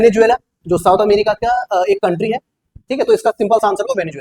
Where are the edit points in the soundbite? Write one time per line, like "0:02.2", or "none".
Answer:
none